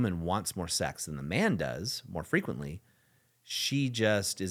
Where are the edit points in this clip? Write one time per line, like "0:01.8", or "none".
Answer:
none